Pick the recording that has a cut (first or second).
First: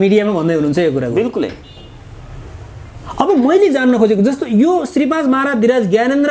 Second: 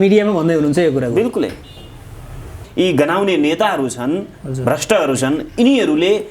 second